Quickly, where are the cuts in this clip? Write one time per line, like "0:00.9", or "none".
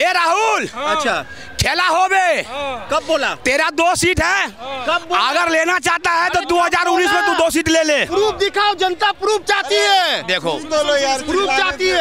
none